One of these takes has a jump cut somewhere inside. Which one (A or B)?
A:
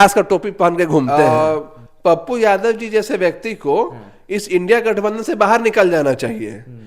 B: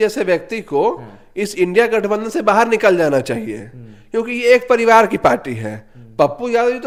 A